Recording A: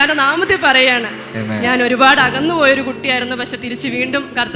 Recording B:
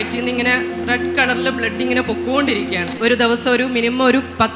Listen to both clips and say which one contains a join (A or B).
B